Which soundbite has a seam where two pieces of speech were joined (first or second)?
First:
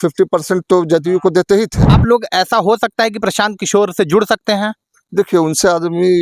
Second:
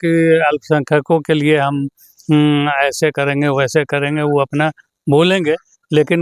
first